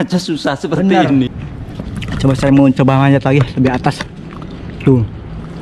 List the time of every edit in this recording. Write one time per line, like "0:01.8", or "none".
0:01.3